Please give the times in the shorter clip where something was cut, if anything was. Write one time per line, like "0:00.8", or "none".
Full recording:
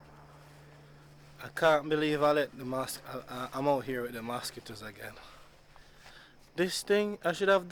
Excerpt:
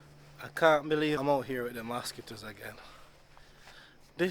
0:01.2